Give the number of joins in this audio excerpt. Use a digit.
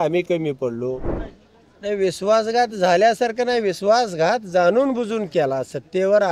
1